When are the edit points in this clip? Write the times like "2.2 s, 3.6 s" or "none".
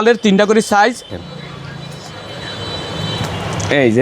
1.1 s